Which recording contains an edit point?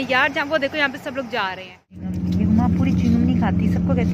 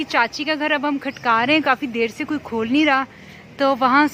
first; 1 cut; at 2.1 s

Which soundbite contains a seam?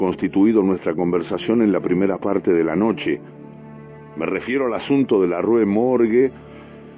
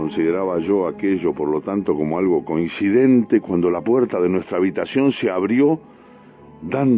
first; 1 cut; at 5.6 s

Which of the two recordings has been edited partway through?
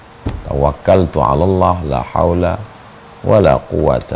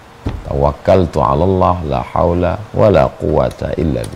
second; 1 cut; at 2.6 s

